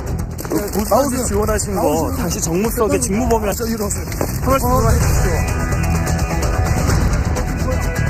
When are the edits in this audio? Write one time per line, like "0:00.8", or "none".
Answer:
0:04.0

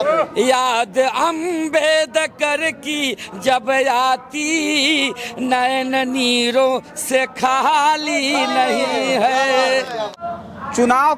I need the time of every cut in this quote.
0:10.1

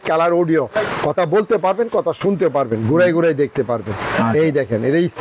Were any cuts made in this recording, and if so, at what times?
none

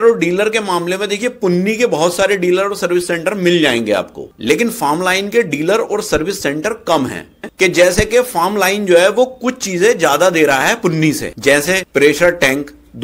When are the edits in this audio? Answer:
0:07.4

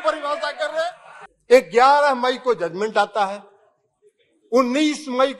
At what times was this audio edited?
0:01.1

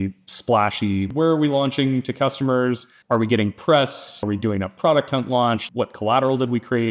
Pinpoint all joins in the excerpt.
0:01.1
0:02.9
0:04.2
0:05.6

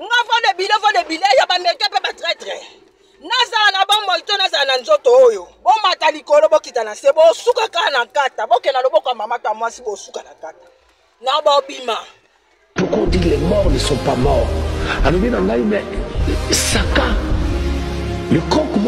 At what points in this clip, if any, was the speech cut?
0:12.7

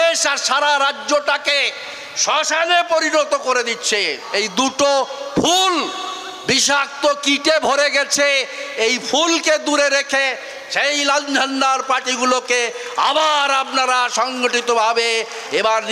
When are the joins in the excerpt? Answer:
0:04.2

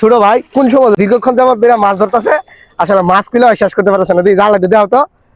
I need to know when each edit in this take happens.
0:00.9

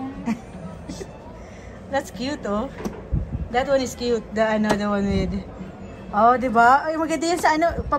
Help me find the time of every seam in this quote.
none

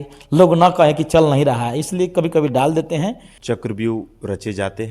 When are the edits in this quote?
0:03.3

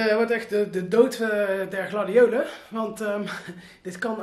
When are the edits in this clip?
none

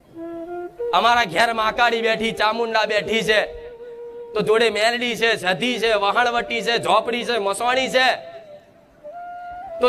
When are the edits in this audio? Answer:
0:00.9

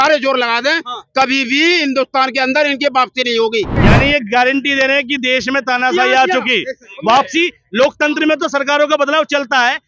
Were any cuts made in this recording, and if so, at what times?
0:03.8

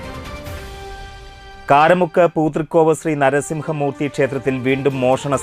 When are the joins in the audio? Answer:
none

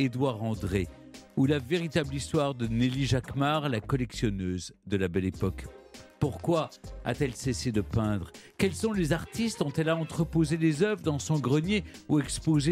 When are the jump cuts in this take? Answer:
none

